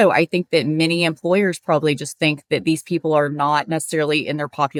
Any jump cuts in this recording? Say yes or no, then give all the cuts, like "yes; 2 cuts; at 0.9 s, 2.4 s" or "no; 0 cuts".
no; 0 cuts